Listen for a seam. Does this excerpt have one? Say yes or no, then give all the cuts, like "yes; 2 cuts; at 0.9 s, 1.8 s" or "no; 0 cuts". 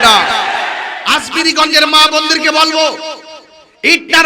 yes; 1 cut; at 0.9 s